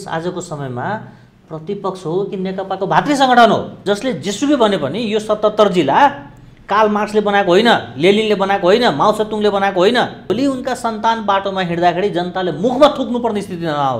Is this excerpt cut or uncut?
cut